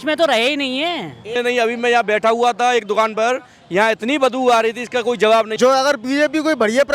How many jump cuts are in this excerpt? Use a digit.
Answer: 2